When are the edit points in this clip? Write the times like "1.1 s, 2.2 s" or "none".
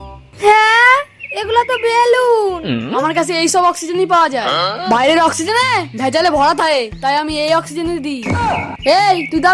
2.9 s

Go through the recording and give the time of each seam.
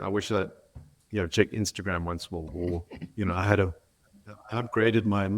2.5 s

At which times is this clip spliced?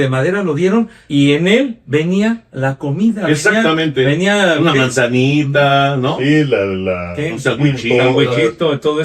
1.0 s, 2.5 s

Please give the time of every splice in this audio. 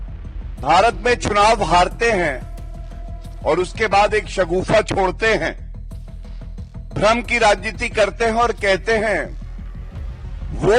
none

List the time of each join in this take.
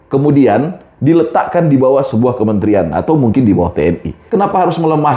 4.2 s

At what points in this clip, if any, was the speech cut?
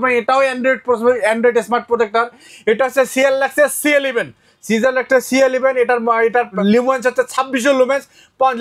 2.5 s

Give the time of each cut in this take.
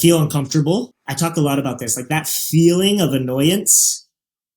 0.9 s

